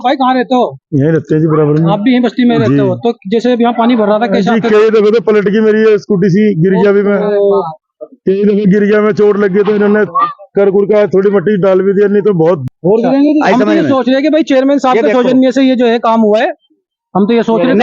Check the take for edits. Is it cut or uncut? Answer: cut